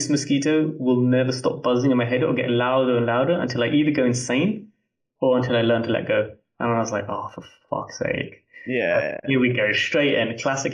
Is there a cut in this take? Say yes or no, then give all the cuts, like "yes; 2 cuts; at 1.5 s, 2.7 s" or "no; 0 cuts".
no; 0 cuts